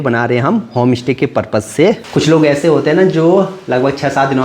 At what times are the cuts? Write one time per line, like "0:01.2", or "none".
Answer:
0:02.0

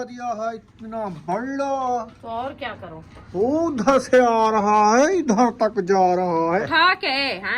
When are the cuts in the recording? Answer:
0:06.7

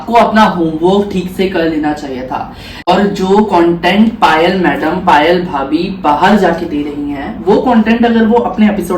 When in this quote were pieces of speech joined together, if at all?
0:02.9

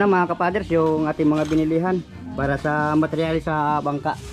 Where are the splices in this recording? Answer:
none

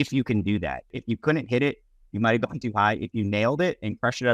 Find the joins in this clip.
0:01.0

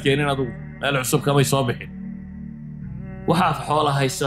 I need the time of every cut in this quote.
0:01.8
0:03.1

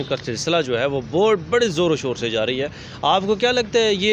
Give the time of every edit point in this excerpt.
none

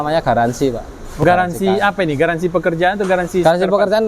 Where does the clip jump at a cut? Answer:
0:01.2

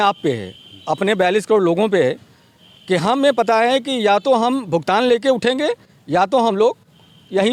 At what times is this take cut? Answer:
none

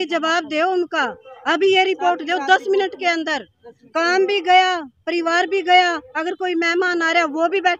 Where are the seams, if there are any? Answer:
none

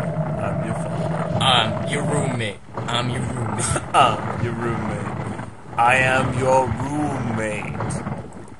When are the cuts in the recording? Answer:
0:06.4

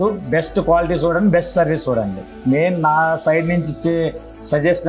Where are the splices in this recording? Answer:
0:02.2

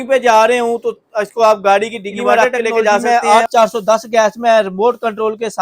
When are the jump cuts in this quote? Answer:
0:03.0

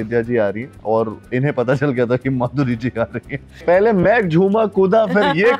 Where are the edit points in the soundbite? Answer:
0:01.2
0:03.6

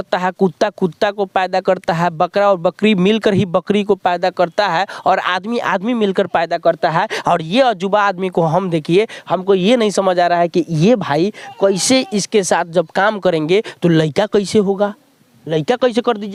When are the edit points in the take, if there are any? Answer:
none

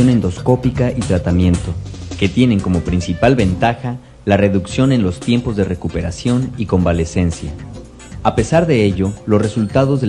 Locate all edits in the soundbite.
none

